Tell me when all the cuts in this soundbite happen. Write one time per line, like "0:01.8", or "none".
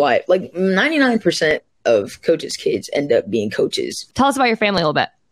0:04.0

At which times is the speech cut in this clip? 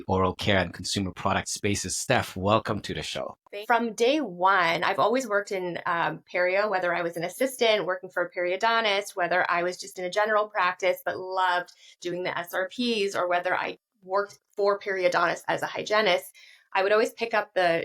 0:03.5

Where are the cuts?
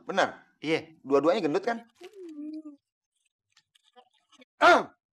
0:01.9

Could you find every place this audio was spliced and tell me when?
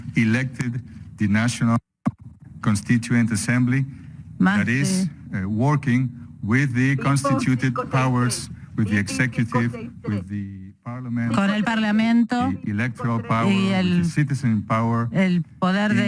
0:06.4

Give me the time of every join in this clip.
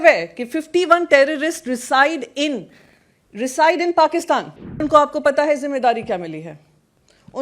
0:04.8

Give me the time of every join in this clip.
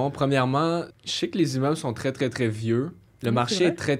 0:01.0
0:03.1

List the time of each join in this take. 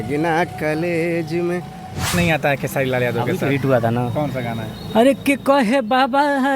0:02.1

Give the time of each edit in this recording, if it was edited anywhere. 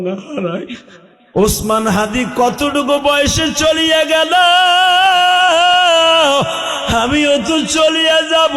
0:01.1

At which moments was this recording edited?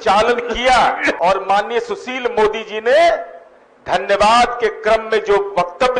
0:01.2

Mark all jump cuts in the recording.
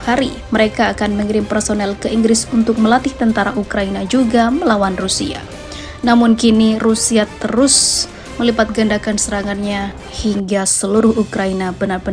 none

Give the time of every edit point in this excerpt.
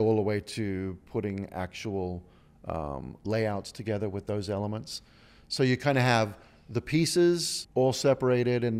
0:07.6

